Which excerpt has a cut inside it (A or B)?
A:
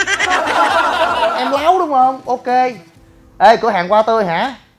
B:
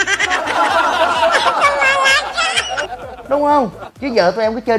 A